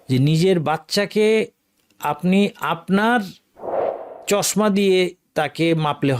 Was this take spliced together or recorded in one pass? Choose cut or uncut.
uncut